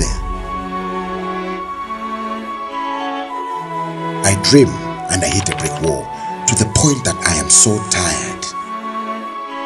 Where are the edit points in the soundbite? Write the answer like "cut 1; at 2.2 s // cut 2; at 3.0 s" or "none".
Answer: cut 1; at 6.4 s